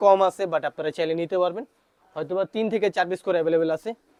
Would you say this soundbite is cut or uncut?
uncut